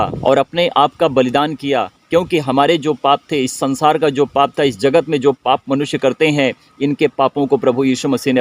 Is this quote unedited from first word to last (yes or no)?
yes